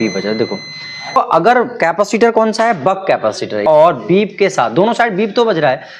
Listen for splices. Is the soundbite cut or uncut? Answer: cut